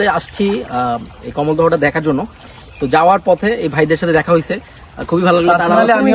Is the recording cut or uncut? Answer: uncut